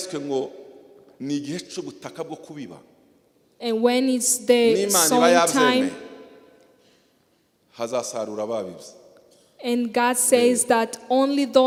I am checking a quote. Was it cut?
no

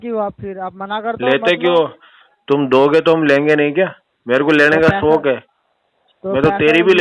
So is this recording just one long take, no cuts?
yes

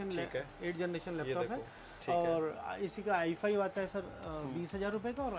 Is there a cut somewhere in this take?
no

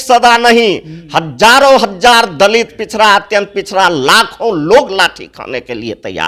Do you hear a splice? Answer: no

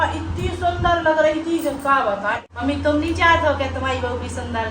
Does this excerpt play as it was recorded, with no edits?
no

